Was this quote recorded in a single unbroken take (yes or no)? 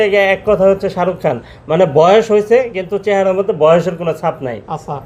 yes